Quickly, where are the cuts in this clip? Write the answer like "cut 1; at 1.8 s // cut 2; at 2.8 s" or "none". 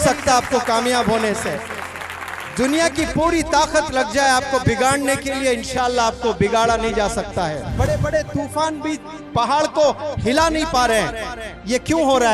cut 1; at 7.7 s